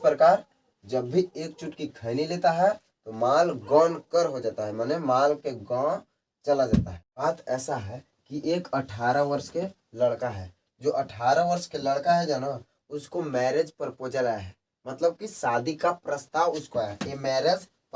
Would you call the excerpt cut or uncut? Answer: cut